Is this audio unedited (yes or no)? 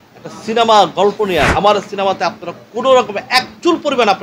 no